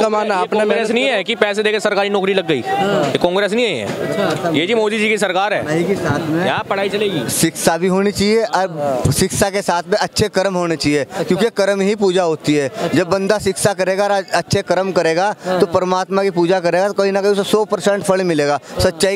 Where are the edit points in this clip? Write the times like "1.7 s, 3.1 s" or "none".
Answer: none